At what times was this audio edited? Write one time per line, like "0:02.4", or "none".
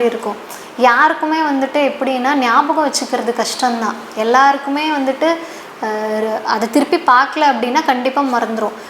none